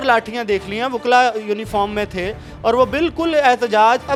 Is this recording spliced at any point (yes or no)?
no